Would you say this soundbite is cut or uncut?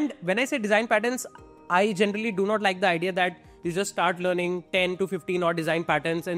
uncut